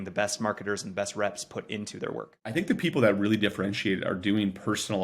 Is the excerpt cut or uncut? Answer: cut